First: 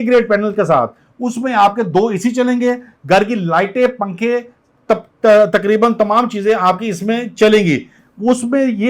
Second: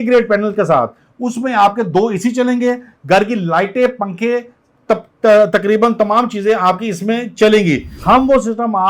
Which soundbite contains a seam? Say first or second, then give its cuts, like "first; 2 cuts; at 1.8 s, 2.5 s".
second; 1 cut; at 7.9 s